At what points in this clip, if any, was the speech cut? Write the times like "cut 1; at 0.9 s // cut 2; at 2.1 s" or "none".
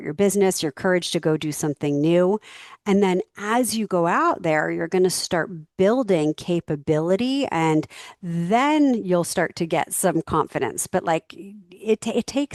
none